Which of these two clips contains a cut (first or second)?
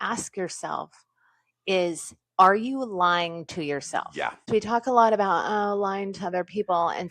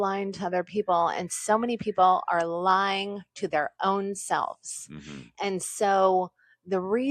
first